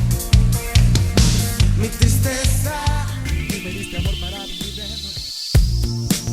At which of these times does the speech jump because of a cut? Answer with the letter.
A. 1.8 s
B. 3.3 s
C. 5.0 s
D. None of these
B